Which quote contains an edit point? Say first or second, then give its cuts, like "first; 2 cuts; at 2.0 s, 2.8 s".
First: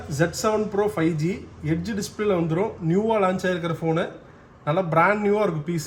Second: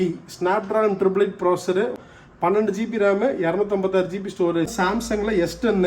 second; 2 cuts; at 2.0 s, 4.7 s